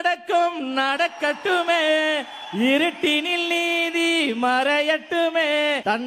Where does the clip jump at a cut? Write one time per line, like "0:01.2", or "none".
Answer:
none

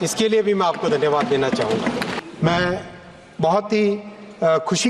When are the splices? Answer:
0:02.1

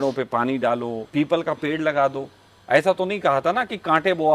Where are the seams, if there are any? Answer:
0:01.0

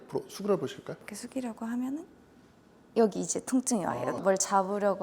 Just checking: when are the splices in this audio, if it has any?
0:01.1

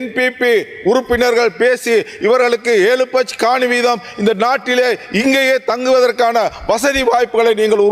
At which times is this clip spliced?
none

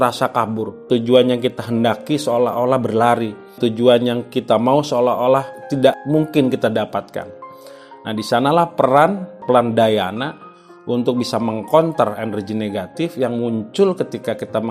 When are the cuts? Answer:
none

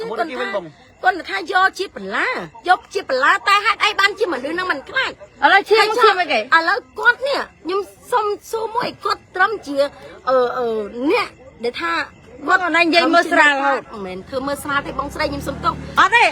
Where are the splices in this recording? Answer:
none

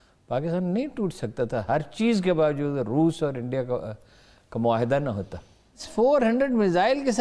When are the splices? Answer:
0:05.9

